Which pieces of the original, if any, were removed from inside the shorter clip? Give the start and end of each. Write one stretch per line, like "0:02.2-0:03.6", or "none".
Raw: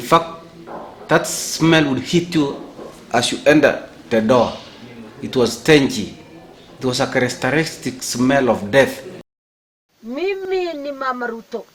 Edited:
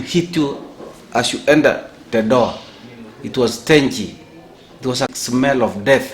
0:07.1-0:08.0